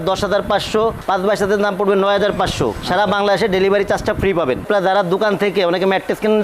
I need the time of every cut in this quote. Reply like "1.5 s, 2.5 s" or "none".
4.7 s